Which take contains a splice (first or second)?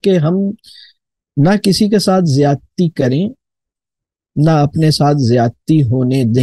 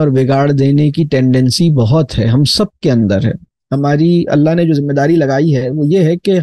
second